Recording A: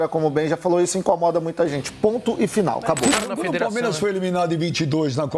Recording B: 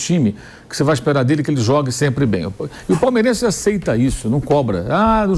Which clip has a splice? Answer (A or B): A